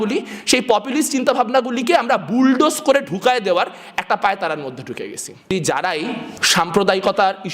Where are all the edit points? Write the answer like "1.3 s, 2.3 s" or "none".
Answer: 5.5 s, 6.3 s